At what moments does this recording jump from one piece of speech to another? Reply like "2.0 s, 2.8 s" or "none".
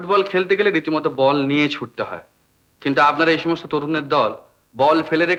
none